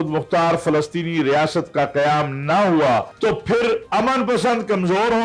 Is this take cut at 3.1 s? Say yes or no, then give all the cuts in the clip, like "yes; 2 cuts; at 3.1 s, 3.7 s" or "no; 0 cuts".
yes; 2 cuts; at 3.1 s, 3.8 s